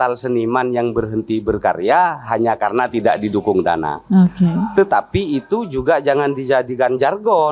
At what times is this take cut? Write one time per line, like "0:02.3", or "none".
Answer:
none